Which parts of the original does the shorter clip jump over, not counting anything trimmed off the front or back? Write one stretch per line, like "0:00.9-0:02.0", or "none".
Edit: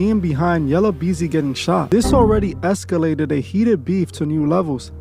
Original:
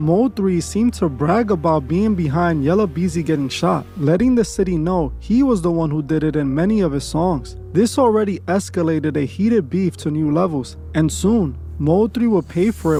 0:03.8-0:07.7